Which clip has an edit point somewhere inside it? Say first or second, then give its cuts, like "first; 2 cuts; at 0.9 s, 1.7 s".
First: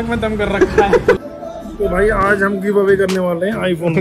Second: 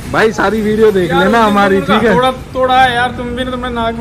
first; 1 cut; at 1.2 s